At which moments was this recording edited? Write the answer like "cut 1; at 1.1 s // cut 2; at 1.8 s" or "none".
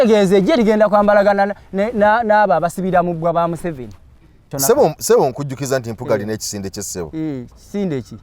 cut 1; at 4.5 s